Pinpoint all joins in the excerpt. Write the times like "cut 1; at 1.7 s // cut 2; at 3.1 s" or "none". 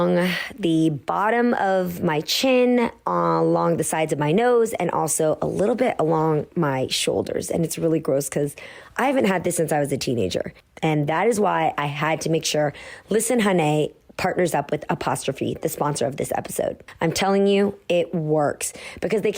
cut 1; at 10.6 s // cut 2; at 16.9 s